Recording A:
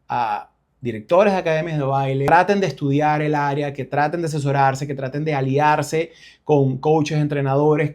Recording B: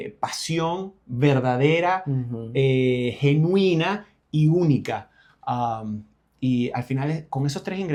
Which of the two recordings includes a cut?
A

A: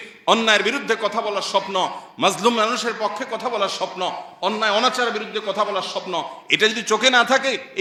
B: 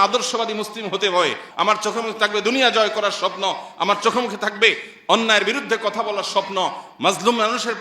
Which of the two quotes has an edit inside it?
B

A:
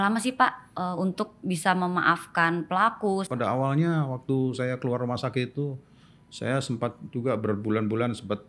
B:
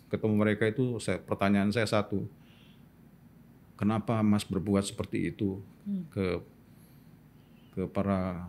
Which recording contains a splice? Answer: A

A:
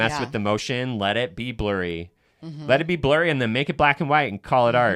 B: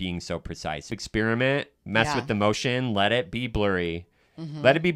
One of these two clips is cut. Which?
B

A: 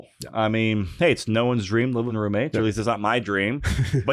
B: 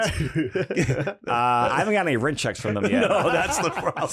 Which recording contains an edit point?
A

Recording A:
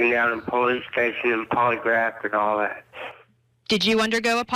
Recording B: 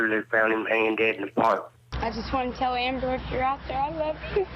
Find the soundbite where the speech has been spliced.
B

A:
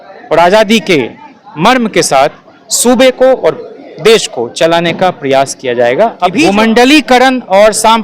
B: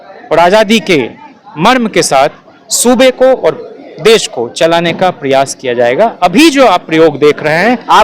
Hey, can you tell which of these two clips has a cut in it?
A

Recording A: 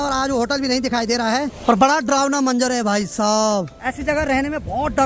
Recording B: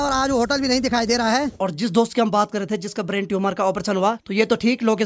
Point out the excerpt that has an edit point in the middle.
B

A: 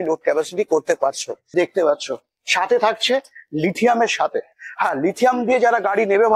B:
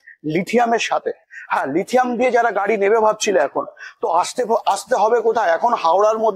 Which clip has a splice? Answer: A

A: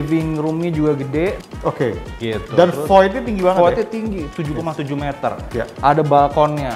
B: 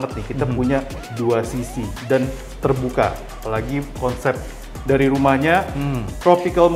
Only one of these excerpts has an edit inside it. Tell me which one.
A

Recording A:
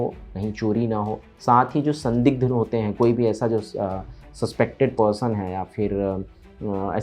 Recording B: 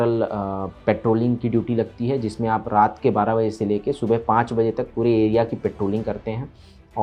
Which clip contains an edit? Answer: A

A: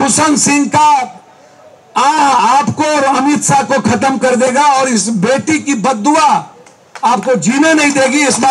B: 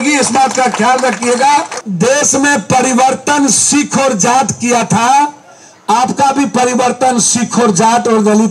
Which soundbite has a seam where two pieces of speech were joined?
B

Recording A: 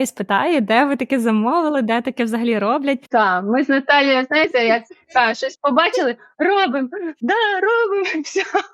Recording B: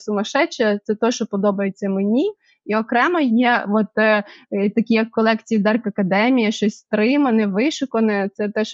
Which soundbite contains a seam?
A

